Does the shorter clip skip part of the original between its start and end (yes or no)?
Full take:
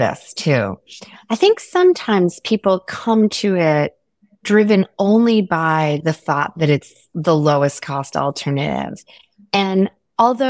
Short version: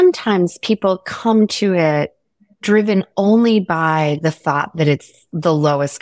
no